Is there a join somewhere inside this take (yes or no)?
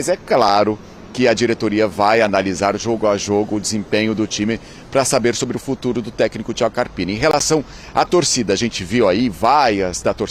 no